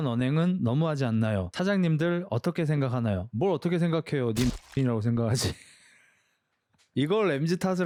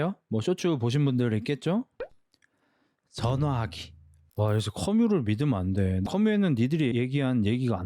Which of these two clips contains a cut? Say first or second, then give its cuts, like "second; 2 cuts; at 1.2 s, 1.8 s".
second; 2 cuts; at 4.2 s, 6.0 s